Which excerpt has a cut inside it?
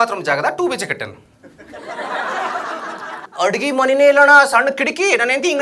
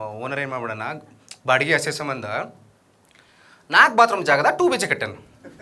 first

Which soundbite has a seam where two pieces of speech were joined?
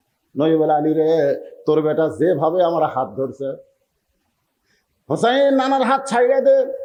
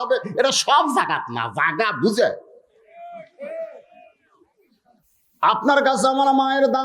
second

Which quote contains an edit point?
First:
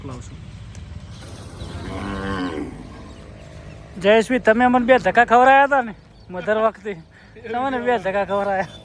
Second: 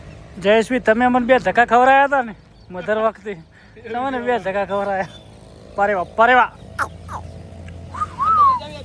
first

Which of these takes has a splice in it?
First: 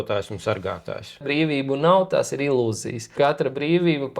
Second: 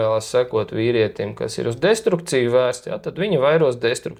first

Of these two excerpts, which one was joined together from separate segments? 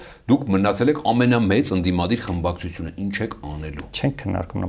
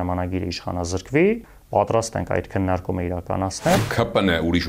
second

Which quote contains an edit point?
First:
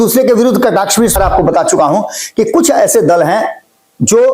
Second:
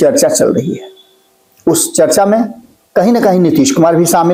first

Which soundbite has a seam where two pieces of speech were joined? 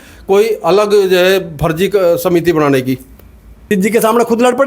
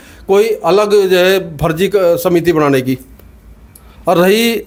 first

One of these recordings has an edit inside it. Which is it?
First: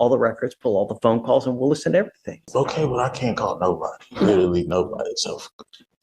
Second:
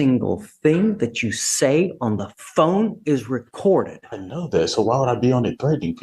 first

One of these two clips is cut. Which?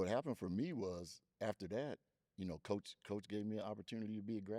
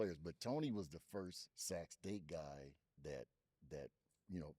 second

